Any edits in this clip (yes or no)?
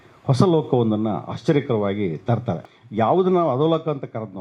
yes